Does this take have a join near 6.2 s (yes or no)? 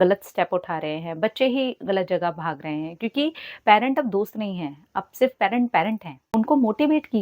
yes